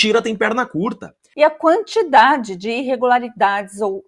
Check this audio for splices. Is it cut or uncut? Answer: cut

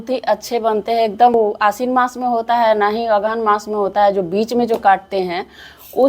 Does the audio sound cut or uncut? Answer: cut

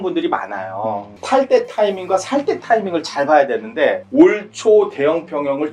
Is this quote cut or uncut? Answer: cut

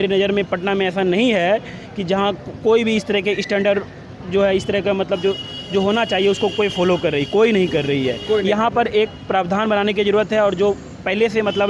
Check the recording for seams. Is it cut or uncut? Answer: uncut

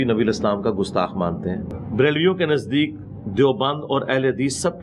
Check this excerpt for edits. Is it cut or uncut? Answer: cut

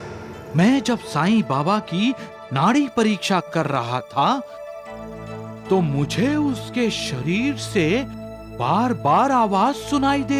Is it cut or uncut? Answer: uncut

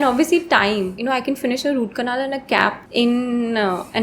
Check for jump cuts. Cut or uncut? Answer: cut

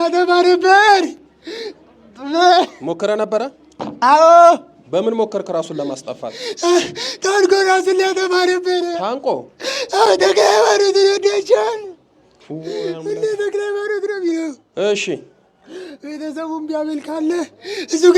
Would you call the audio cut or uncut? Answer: uncut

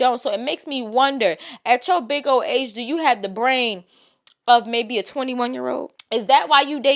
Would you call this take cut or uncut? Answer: cut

